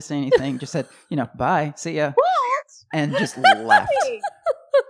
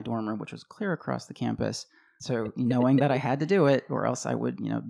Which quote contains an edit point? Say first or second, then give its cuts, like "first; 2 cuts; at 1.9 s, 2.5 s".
second; 1 cut; at 2.1 s